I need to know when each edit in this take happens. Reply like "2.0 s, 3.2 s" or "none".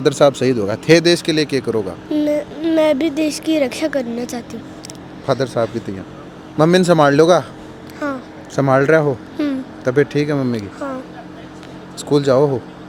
none